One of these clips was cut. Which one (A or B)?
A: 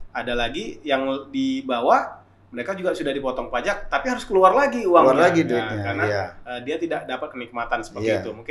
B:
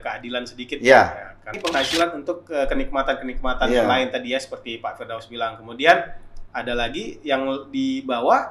B